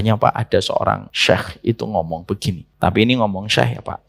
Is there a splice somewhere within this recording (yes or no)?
yes